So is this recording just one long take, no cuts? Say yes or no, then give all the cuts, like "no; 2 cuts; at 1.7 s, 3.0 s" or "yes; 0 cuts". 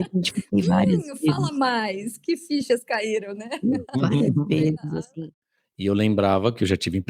no; 1 cut; at 5.0 s